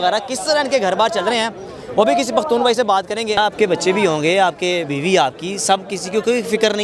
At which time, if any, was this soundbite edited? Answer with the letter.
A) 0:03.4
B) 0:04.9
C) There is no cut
A